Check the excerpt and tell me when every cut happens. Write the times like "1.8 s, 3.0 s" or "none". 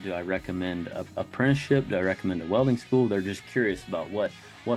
none

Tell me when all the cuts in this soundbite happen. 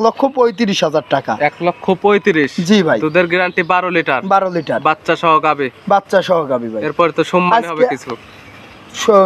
none

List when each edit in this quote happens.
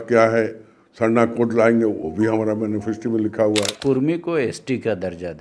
3.7 s

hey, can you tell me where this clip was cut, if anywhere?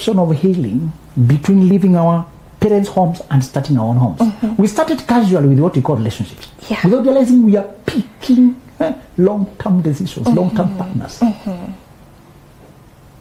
none

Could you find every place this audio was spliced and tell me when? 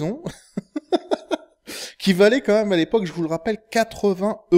1.1 s

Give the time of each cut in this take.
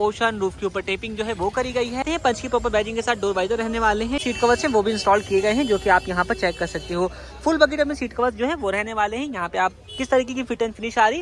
2.0 s, 4.2 s

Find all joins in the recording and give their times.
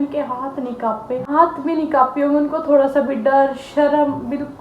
1.3 s

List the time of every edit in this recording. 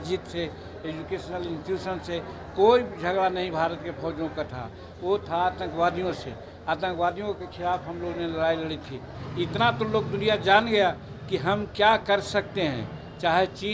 9.2 s

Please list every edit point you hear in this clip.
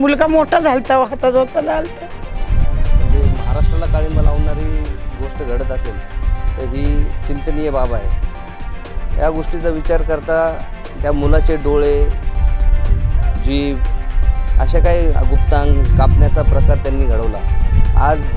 2.4 s

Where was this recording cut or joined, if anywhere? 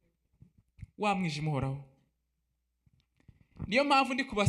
none

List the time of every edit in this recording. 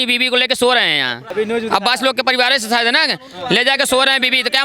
1.2 s

